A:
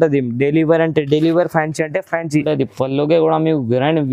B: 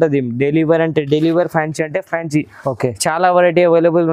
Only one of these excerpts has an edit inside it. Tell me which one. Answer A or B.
A